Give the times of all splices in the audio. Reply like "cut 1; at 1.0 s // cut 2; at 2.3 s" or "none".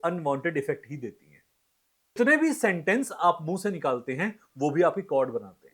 cut 1; at 2.2 s

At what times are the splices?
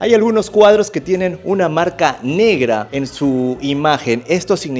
none

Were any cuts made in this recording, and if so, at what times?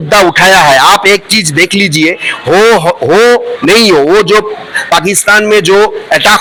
none

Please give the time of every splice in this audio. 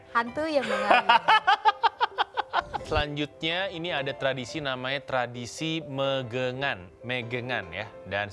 cut 1; at 2.8 s

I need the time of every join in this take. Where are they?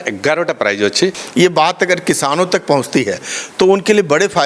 cut 1; at 1.2 s

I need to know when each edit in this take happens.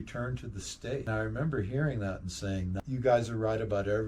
cut 1; at 1.0 s // cut 2; at 2.8 s

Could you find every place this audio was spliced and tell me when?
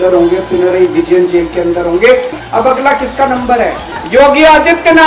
cut 1; at 2.4 s

